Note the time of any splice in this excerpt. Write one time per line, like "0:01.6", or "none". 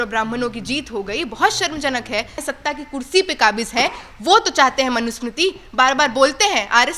0:02.4